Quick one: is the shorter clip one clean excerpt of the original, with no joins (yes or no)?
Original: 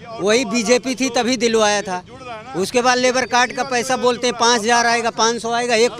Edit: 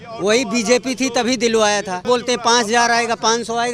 no